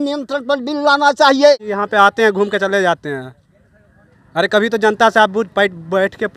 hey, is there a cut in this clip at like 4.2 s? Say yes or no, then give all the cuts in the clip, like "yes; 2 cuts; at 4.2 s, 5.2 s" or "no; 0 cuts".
no; 1 cut; at 1.7 s